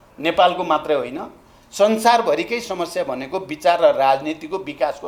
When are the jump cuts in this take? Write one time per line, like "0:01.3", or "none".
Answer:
none